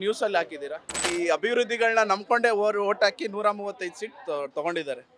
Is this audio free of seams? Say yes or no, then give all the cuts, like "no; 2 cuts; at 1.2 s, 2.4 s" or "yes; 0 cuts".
no; 1 cut; at 0.9 s